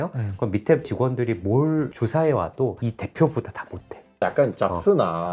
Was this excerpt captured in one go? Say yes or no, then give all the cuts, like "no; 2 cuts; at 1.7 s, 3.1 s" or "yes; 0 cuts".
no; 2 cuts; at 2.8 s, 4.0 s